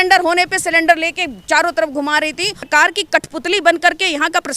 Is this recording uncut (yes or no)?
no